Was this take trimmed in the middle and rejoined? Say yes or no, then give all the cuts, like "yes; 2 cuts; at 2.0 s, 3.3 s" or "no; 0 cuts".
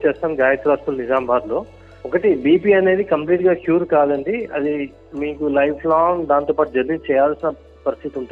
yes; 1 cut; at 1.8 s